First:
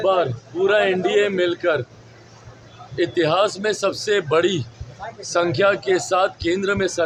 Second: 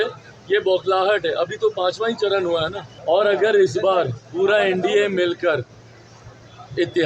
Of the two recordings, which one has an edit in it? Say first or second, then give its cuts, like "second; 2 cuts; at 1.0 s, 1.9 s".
second; 1 cut; at 2.9 s